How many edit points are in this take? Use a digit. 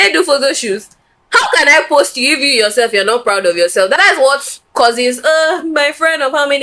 1